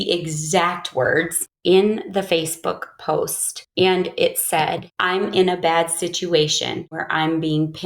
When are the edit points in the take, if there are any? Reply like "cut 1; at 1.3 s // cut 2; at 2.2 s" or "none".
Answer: cut 1; at 1.5 s // cut 2; at 7.0 s